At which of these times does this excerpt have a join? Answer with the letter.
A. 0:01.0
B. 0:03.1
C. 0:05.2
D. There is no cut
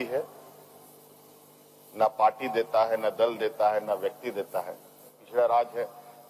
C